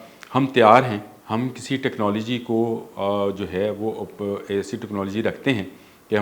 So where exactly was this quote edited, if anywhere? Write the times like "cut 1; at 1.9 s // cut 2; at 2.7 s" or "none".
cut 1; at 1.1 s